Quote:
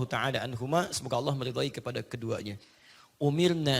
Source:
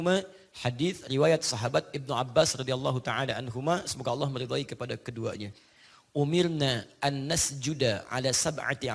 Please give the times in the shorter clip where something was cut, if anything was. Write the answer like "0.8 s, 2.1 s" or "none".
none